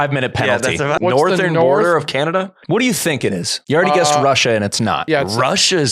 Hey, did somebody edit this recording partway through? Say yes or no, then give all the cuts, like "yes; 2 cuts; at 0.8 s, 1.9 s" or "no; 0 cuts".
yes; 4 cuts; at 1.0 s, 2.5 s, 3.5 s, 5.0 s